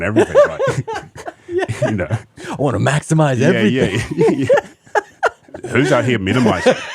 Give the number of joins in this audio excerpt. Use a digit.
2